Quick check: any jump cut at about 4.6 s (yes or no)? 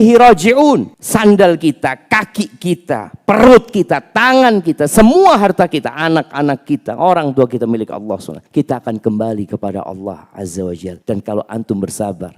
no